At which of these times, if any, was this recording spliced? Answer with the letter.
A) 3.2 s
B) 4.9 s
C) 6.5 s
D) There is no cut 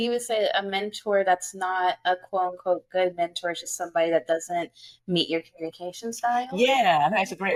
D